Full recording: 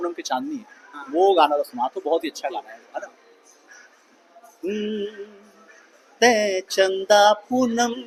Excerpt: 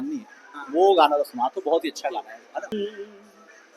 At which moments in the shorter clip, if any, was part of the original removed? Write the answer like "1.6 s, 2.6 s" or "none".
2.7 s